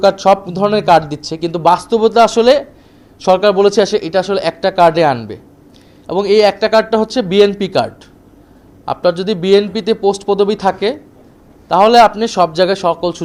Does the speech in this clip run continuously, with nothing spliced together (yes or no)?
yes